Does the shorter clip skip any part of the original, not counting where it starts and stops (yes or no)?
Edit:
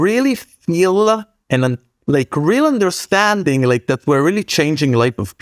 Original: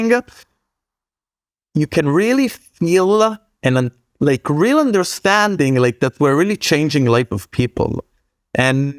no